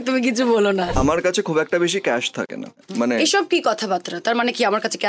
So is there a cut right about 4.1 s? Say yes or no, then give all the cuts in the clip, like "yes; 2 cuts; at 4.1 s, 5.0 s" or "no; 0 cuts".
no; 2 cuts; at 0.9 s, 2.8 s